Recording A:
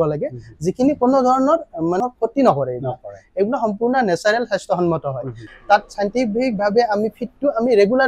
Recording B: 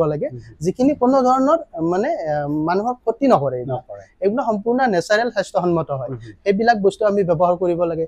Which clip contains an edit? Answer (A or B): A